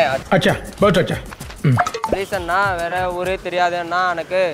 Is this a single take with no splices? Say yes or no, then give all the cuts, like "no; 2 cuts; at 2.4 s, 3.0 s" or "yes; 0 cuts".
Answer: yes; 0 cuts